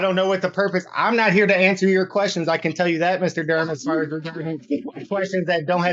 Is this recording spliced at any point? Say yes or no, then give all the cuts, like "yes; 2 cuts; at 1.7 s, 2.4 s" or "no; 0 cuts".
no; 0 cuts